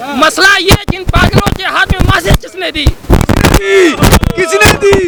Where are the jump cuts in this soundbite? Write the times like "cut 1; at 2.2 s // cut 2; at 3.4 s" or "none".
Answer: none

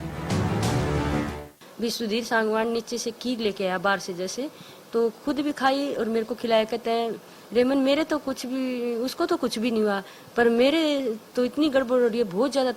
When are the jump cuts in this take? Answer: cut 1; at 1.3 s

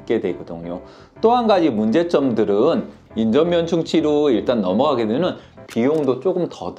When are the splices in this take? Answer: cut 1; at 3.0 s

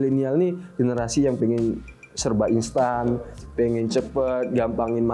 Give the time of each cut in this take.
none

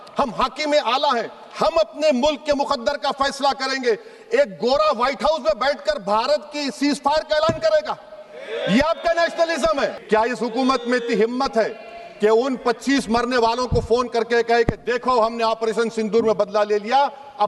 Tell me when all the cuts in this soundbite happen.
cut 1; at 10.0 s

